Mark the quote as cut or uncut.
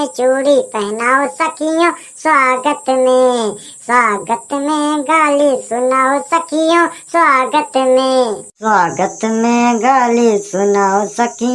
uncut